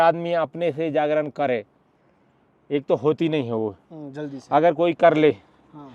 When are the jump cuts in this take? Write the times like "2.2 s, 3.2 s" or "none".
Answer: none